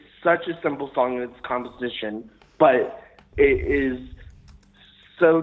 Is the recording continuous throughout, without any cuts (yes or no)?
yes